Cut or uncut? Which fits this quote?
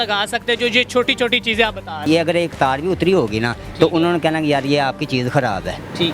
cut